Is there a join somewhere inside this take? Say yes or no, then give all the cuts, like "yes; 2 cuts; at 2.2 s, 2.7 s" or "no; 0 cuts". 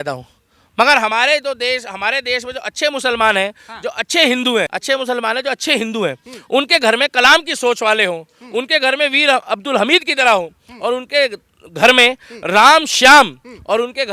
yes; 1 cut; at 4.7 s